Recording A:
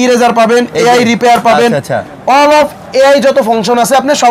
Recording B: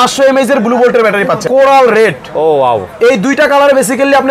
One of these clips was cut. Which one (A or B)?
B